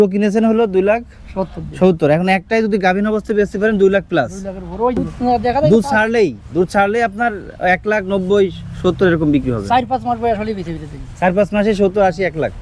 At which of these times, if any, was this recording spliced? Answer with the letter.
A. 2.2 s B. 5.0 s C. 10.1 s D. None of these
B